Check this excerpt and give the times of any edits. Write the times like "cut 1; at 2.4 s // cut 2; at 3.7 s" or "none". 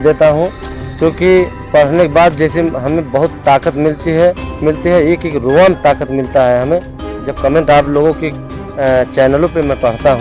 none

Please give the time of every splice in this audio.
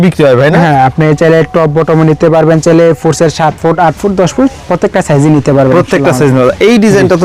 none

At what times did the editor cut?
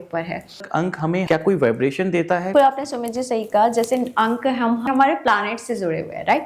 cut 1; at 0.8 s // cut 2; at 2.5 s // cut 3; at 4.9 s

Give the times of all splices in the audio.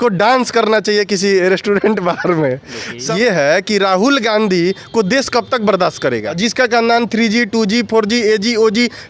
cut 1; at 3.1 s // cut 2; at 6.4 s

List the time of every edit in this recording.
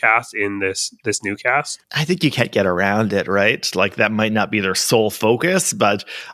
none

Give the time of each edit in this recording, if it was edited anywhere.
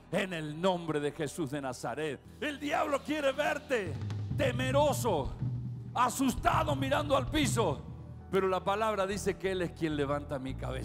cut 1; at 2.3 s

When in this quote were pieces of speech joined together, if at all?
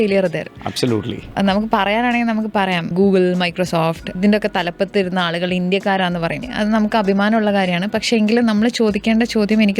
cut 1; at 1.3 s // cut 2; at 2.9 s // cut 3; at 4.1 s // cut 4; at 6.5 s

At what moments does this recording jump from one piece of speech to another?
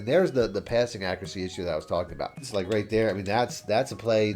cut 1; at 2.4 s

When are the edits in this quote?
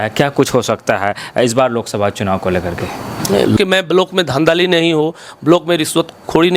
cut 1; at 3.6 s

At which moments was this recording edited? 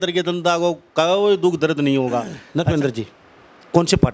cut 1; at 2.4 s

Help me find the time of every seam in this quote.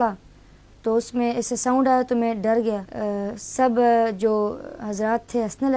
cut 1; at 2.9 s

